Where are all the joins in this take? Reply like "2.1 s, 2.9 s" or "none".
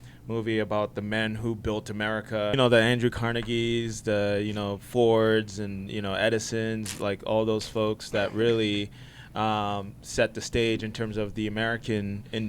2.5 s